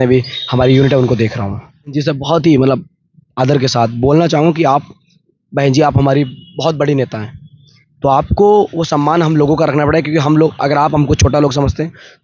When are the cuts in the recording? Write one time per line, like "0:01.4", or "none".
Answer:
0:01.9

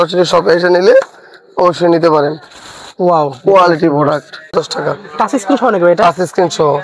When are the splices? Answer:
0:04.5

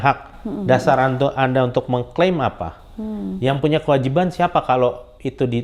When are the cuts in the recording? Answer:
none

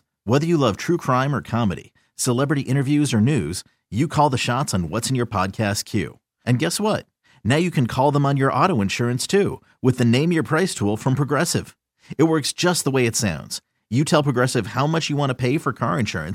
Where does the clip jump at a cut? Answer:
none

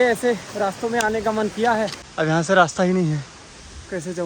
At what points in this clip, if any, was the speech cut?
0:02.0

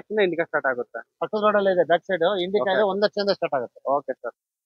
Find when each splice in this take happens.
none

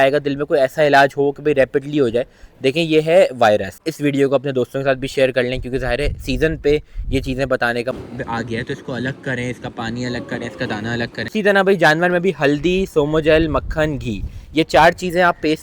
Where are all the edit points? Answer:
0:03.8
0:07.9
0:11.3

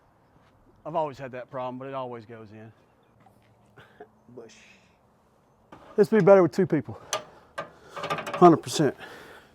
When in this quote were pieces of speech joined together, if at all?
0:05.7

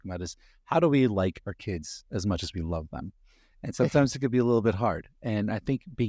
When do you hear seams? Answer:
none

